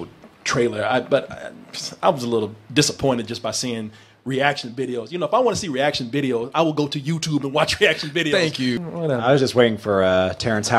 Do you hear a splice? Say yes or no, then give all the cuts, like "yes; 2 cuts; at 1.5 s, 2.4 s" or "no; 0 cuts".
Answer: yes; 1 cut; at 8.8 s